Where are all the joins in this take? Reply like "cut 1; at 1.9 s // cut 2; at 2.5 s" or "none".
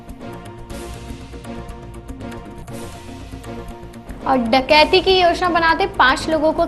cut 1; at 2.1 s